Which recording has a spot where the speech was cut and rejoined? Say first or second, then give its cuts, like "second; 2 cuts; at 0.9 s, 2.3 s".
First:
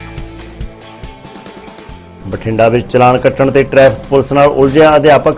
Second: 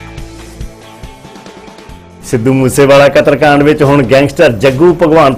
first; 1 cut; at 1.9 s